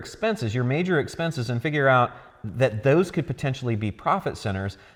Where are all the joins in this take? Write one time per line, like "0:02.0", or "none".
none